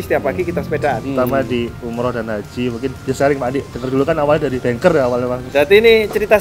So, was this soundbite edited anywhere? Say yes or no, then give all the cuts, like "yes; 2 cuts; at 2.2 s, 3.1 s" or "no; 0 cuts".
yes; 4 cuts; at 1.0 s, 3.0 s, 4.6 s, 5.4 s